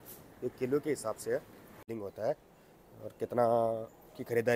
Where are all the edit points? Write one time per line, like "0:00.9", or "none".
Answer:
0:01.9